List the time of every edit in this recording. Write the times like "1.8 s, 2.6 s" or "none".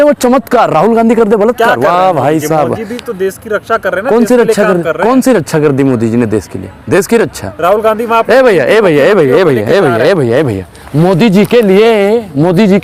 none